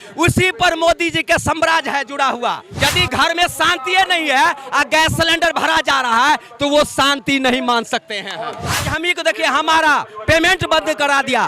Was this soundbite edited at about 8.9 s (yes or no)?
yes